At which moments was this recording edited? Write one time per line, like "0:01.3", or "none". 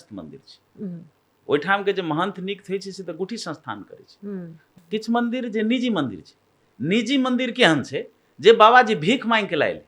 0:04.6